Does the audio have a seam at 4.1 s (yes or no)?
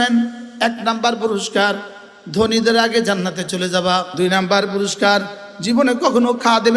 yes